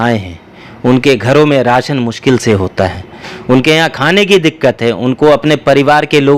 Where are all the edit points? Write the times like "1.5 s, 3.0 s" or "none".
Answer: none

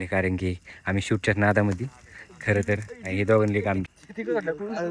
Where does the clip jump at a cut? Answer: 3.9 s

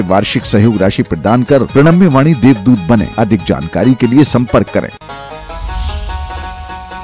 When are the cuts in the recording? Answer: 4.9 s

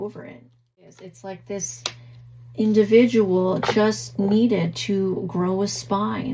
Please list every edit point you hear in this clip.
1.1 s

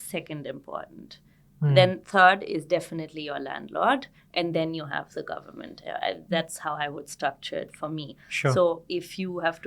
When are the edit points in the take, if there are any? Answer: none

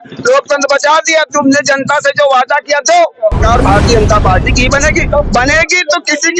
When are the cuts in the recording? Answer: 3.4 s

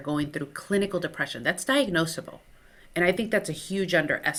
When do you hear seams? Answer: none

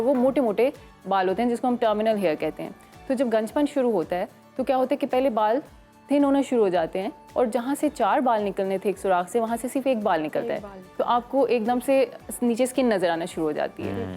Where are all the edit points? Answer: none

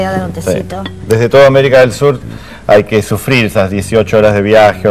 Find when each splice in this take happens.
3.1 s

